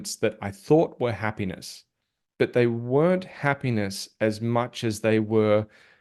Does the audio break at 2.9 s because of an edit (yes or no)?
no